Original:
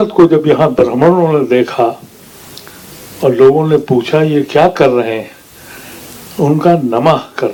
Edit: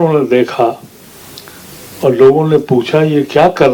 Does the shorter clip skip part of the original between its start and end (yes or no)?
no